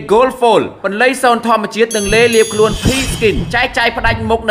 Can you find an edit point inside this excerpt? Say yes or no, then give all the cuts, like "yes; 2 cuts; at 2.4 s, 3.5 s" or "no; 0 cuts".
no; 0 cuts